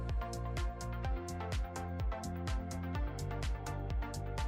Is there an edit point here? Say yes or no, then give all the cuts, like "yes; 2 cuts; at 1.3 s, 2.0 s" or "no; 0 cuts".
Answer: no; 0 cuts